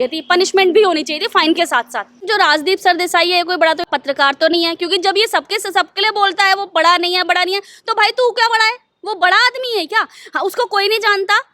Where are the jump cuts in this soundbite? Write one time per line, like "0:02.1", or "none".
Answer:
0:02.3
0:03.9